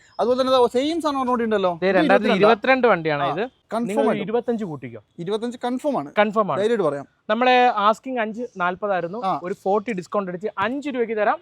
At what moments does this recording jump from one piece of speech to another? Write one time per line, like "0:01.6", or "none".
0:03.6